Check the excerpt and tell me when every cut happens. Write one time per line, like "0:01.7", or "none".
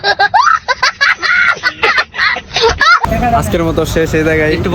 0:03.0